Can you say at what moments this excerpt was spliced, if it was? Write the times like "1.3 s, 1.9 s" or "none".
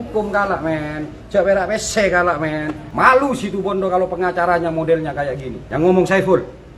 2.8 s, 5.5 s